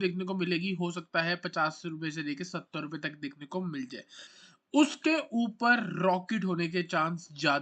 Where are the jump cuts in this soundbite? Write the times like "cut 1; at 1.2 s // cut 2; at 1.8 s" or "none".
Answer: cut 1; at 4.3 s